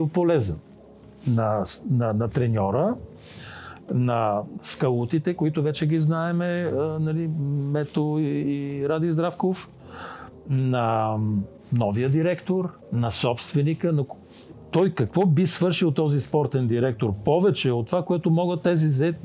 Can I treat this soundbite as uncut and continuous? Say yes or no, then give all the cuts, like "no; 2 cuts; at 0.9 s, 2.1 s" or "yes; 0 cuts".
no; 3 cuts; at 4.5 s, 11.6 s, 12.8 s